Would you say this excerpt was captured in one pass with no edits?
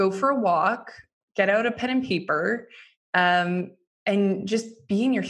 yes; 0 cuts

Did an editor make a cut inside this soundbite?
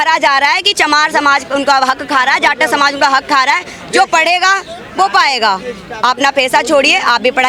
no; 0 cuts

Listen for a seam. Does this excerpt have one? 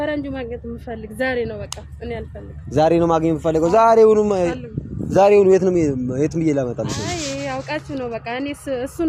no; 0 cuts

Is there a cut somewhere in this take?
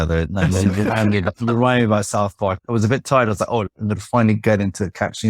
yes; 2 cuts; at 2.6 s, 3.7 s

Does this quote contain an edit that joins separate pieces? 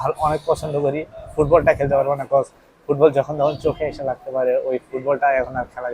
no; 0 cuts

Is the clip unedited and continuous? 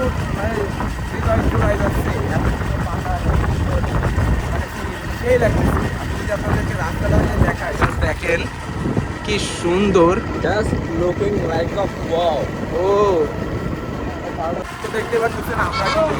yes; 0 cuts

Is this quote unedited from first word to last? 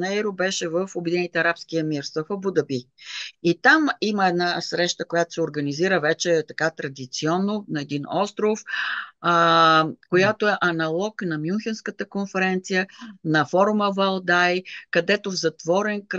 yes; 0 cuts

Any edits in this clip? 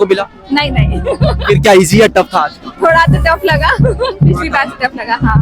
no; 0 cuts

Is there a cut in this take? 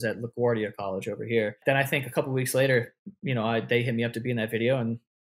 yes; 1 cut; at 1.6 s

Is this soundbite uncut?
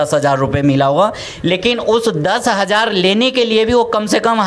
yes; 0 cuts

